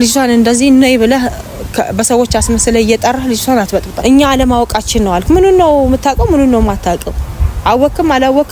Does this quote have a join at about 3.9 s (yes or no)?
yes